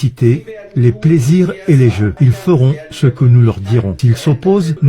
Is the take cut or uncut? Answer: cut